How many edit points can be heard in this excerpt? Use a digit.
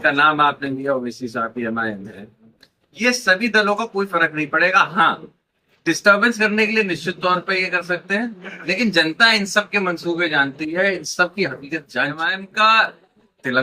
1